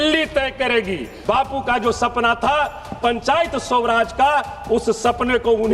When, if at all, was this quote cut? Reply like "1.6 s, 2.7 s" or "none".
1.0 s